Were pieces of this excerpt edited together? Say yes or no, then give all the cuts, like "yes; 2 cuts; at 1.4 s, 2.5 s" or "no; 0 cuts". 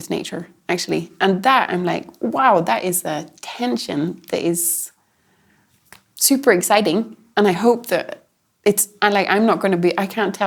no; 0 cuts